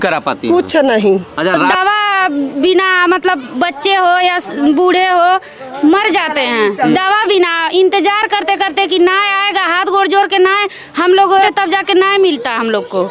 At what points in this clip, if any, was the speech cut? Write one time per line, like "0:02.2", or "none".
0:01.7
0:11.5